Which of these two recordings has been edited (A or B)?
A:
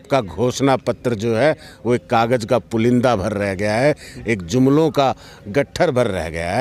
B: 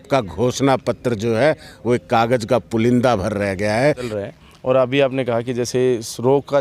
B